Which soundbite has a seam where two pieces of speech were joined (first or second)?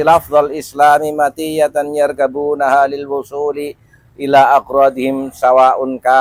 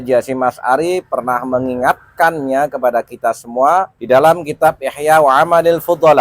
second